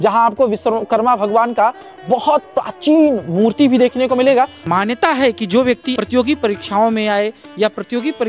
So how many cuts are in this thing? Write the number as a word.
two